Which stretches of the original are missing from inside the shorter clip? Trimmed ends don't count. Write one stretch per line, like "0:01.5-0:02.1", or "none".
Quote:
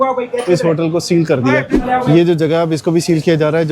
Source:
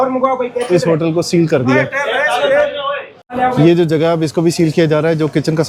0:01.9-0:03.2

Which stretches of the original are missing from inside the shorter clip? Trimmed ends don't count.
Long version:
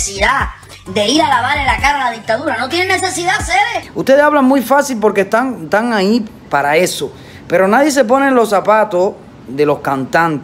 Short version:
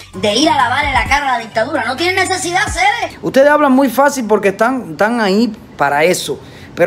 none

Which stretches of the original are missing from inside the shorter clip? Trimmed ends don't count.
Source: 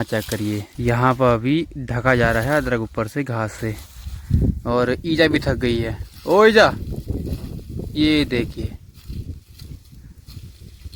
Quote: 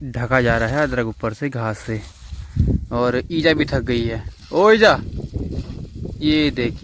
none

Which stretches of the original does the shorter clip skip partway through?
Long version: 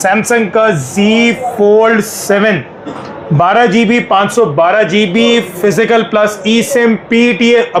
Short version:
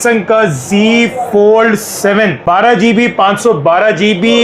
0:02.6-0:03.3

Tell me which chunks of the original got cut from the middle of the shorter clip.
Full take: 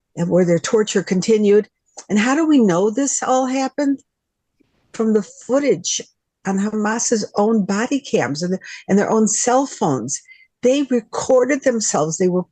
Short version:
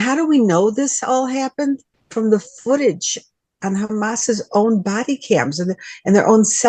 0:04.2-0:04.8

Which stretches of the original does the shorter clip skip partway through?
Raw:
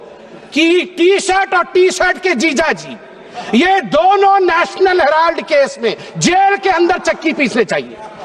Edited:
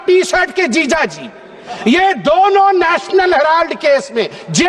none

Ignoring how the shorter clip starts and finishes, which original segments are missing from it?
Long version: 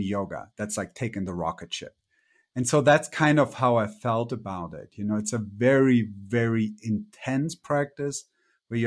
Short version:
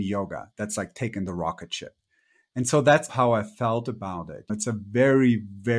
0:03.1-0:03.5
0:04.9-0:05.2

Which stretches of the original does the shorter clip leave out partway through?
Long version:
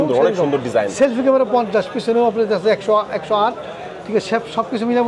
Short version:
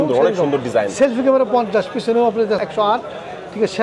0:02.6-0:03.1

